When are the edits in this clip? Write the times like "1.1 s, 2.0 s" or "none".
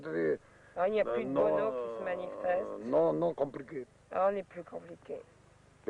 none